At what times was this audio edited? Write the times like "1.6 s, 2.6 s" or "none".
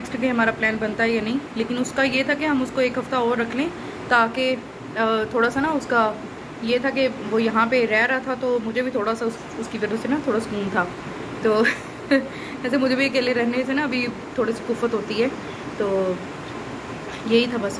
none